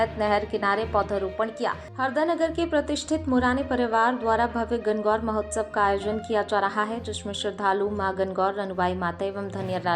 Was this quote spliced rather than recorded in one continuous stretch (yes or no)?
yes